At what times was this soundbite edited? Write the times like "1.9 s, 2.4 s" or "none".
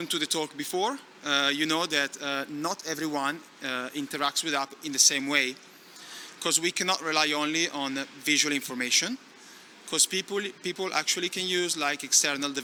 none